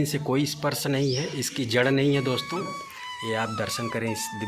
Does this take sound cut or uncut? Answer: uncut